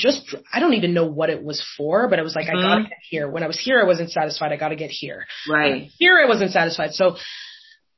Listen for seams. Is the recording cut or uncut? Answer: uncut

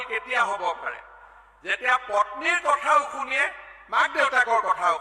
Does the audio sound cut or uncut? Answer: uncut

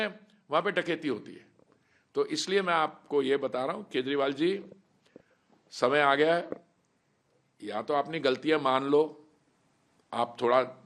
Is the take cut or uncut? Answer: uncut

